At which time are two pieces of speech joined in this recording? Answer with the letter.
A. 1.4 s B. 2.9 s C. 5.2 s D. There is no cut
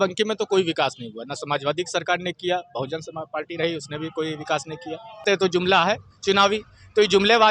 C